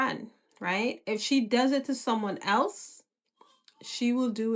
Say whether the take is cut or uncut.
uncut